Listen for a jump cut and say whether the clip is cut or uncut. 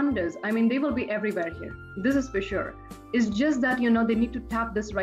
uncut